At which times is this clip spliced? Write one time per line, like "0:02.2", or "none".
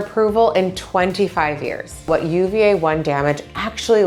0:02.1